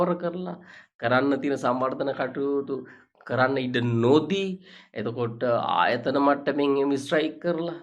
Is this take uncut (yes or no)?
yes